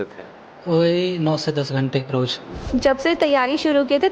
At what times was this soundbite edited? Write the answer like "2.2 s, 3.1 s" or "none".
2.7 s